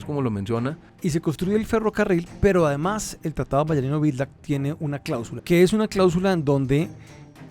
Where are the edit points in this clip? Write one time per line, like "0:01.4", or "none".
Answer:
0:00.9
0:05.3